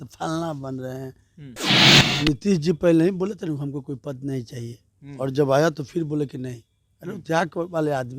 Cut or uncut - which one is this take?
cut